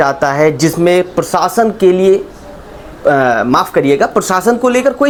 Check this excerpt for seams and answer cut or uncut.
uncut